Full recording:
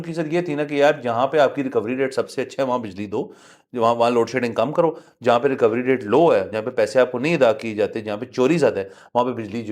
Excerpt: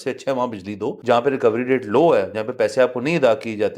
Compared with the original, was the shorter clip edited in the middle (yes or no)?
yes